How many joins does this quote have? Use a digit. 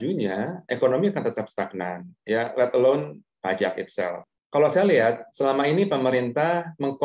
1